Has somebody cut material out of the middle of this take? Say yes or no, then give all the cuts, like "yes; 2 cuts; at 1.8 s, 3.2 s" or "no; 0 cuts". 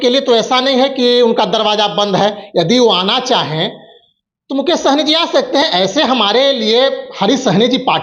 no; 0 cuts